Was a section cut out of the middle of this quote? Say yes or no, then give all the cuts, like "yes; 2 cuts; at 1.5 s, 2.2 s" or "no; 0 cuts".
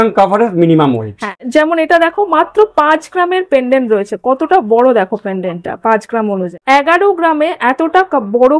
yes; 2 cuts; at 1.4 s, 6.5 s